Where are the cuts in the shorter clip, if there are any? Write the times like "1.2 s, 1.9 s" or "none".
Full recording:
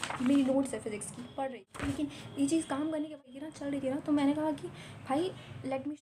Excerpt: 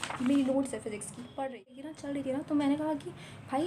1.7 s